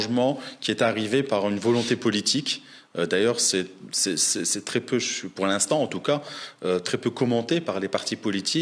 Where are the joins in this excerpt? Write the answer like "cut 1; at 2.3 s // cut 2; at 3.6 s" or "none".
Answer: none